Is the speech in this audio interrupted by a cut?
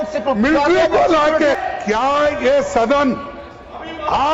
yes; 1 cut; at 1.6 s

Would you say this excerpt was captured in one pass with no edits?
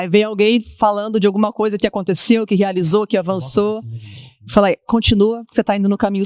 yes; 0 cuts

